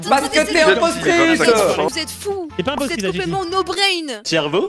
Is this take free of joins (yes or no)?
yes